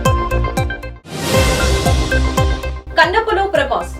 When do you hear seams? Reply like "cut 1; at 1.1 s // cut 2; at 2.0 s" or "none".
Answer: cut 1; at 2.7 s